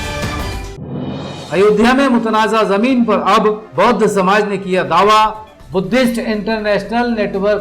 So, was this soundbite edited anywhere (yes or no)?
yes